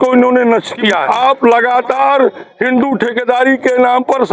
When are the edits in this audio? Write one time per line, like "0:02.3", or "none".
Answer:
0:01.0